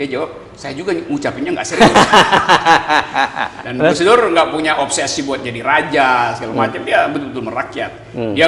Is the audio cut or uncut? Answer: cut